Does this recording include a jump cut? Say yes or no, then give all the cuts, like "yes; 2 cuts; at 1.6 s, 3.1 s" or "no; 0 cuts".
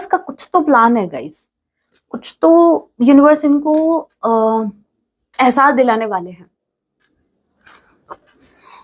no; 0 cuts